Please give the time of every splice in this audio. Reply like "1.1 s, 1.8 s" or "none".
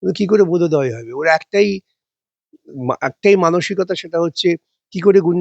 none